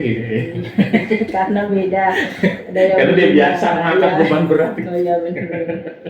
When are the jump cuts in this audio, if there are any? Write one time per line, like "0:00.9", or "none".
none